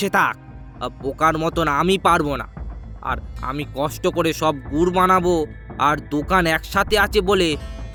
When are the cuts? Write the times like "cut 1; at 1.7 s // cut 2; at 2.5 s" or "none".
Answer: none